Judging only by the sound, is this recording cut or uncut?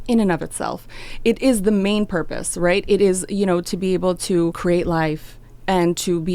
cut